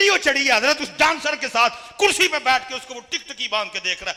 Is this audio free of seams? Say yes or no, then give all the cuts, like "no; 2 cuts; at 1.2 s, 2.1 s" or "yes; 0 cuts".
yes; 0 cuts